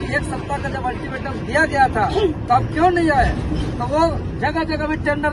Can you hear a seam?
no; 0 cuts

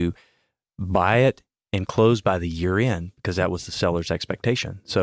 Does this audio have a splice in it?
no; 0 cuts

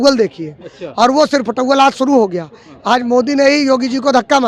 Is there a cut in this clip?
no; 0 cuts

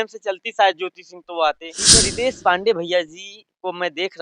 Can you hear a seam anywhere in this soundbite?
yes; 1 cut; at 1.7 s

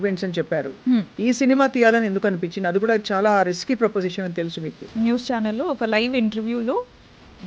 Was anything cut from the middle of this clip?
yes; 2 cuts; at 1.1 s, 4.9 s

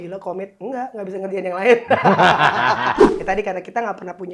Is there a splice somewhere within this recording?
yes; 1 cut; at 3.2 s

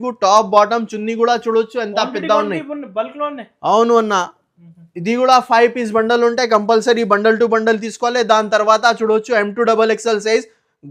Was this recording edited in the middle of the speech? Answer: no; 0 cuts

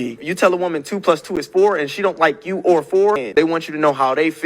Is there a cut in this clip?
yes; 1 cut; at 3.2 s

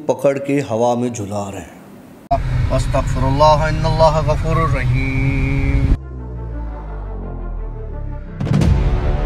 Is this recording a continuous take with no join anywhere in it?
no; 1 cut; at 2.1 s

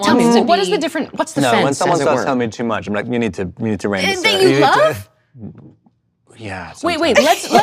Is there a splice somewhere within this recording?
no; 0 cuts

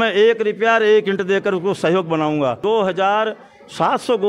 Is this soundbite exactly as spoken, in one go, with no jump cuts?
no; 1 cut; at 2.6 s

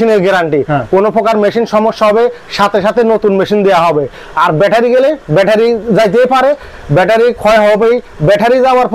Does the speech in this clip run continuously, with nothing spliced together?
yes; 0 cuts

